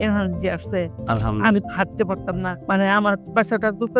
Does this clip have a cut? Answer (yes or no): yes